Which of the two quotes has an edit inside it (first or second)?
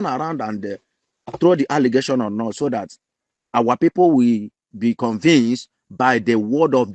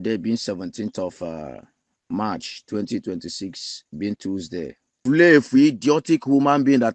second